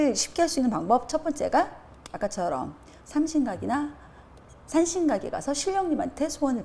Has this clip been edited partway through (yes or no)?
no